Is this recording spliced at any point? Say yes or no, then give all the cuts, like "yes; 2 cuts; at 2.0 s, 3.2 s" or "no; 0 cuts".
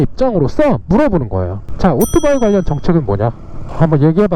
no; 0 cuts